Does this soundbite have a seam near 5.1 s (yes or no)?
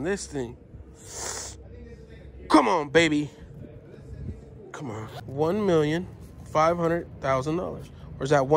yes